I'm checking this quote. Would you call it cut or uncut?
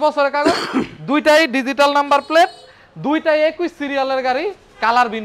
uncut